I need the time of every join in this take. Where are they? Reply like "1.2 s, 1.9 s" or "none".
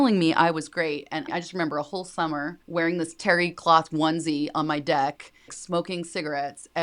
1.3 s, 2.6 s, 5.5 s